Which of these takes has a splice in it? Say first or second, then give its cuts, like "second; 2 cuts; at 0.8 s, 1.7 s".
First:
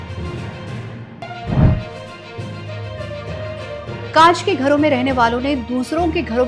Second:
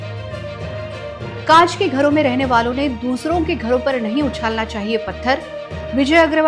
first; 1 cut; at 1.1 s